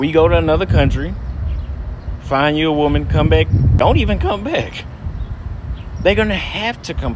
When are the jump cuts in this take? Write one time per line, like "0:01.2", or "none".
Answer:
0:03.7